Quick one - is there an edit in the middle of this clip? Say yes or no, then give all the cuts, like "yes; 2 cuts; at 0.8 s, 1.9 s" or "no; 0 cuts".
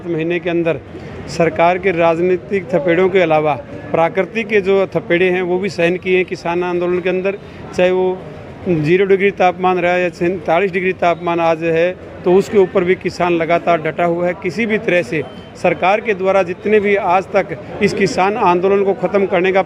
no; 0 cuts